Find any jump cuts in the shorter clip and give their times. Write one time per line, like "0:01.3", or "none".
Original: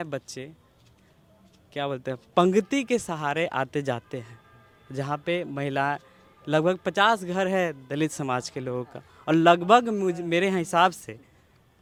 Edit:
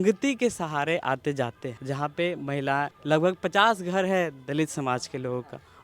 0:01.7
0:03.0